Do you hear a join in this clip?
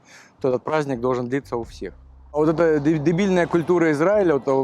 yes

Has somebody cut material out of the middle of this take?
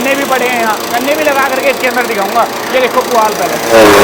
no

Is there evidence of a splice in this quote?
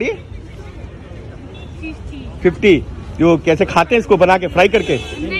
no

